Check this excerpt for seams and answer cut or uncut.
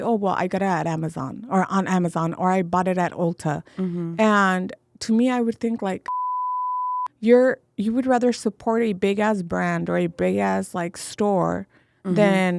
uncut